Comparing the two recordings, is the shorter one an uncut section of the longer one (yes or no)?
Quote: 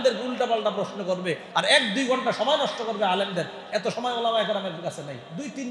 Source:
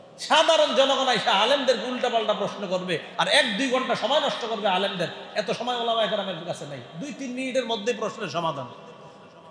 yes